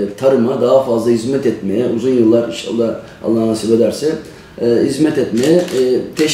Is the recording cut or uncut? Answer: uncut